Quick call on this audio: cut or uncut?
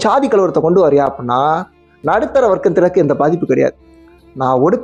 uncut